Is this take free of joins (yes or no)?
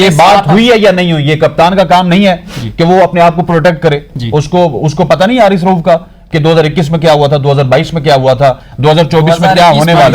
yes